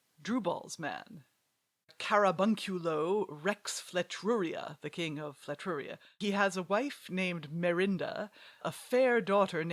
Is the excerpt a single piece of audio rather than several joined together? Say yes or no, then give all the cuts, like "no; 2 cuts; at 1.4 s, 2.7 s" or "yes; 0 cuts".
no; 2 cuts; at 6.2 s, 8.7 s